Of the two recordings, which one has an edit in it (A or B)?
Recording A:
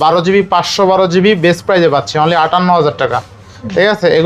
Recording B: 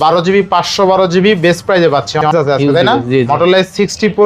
B